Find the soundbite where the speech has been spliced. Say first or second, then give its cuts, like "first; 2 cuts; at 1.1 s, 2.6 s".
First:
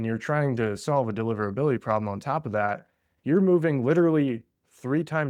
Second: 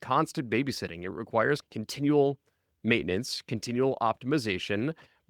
second; 1 cut; at 1.6 s